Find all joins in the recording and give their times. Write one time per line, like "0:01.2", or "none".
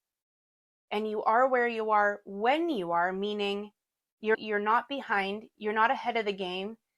none